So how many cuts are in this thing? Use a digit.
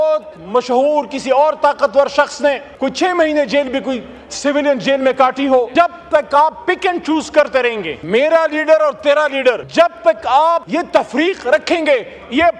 5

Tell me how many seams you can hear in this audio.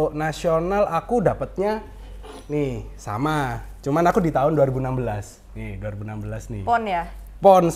0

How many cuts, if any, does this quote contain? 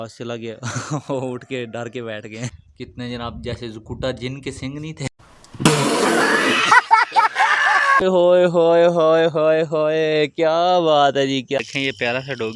3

